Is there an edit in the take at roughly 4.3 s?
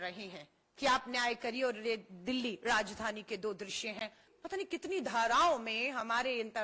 yes; 1 cut; at 4.3 s

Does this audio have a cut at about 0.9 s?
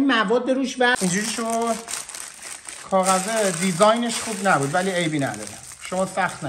yes; 1 cut; at 0.9 s

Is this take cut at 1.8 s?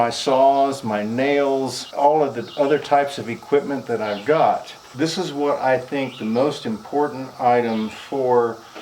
yes; 2 cuts; at 1.8 s, 4.8 s

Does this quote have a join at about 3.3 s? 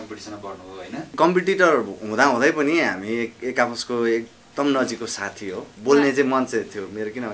no; 2 cuts; at 1.1 s, 5.7 s

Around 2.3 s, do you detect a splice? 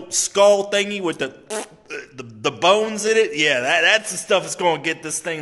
no; 0 cuts

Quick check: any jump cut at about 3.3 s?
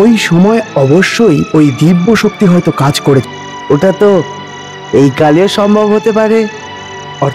yes; 1 cut; at 3.3 s

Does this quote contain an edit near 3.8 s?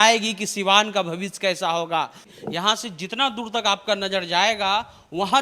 no; 1 cut; at 2.3 s

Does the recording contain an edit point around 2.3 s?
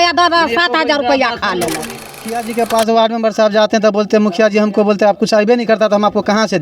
yes; 1 cut; at 2.3 s

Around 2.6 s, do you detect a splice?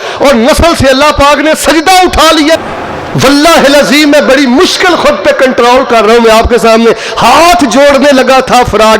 yes; 1 cut; at 2.6 s

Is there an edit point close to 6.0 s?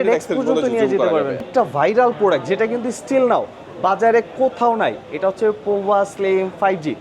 no; 1 cut; at 1.4 s

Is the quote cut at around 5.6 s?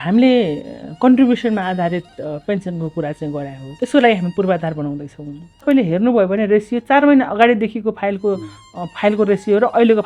yes; 2 cuts; at 3.6 s, 5.6 s

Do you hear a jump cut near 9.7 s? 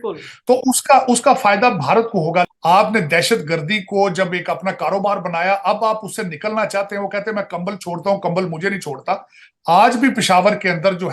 no; 1 cut; at 2.5 s

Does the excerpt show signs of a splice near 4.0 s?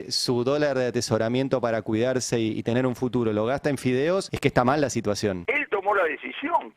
no; 1 cut; at 5.4 s

